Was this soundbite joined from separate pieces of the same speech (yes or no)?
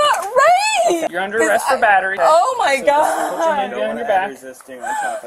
yes